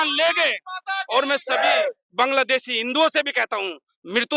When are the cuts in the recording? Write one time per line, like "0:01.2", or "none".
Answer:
none